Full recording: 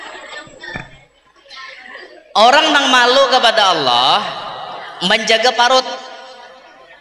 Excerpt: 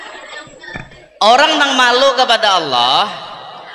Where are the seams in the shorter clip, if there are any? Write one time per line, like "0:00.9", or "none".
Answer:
0:01.0